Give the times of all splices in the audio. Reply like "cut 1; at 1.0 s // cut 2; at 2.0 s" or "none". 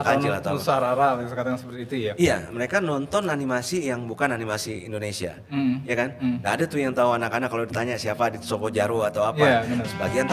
none